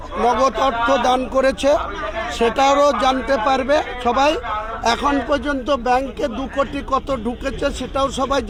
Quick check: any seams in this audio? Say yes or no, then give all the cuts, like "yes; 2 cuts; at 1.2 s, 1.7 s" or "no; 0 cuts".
no; 0 cuts